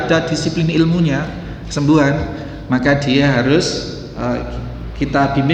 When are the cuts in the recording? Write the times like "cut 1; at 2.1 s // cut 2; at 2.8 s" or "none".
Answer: none